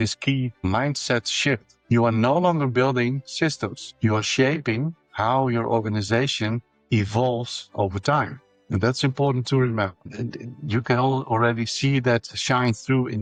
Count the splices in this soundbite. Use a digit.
0